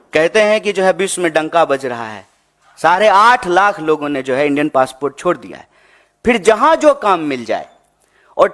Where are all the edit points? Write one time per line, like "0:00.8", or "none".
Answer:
none